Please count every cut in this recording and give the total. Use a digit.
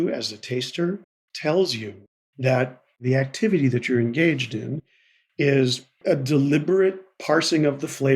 2